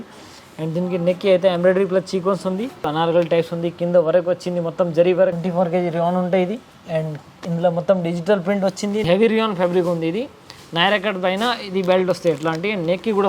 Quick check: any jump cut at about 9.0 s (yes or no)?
yes